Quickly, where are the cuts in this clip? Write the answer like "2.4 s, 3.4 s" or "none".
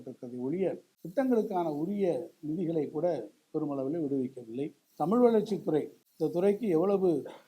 0.9 s, 4.8 s, 6.0 s